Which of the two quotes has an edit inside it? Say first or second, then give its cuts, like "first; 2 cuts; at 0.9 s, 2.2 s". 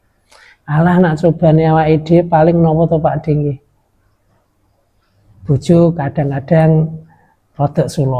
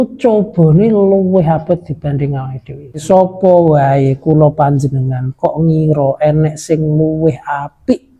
second; 1 cut; at 3.0 s